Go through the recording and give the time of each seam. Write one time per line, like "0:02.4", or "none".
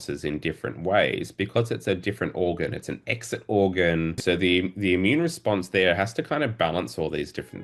0:04.2